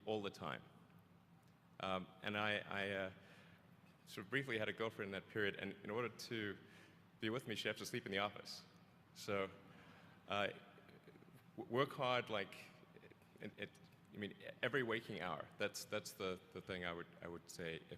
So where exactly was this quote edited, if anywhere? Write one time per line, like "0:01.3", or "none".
0:10.7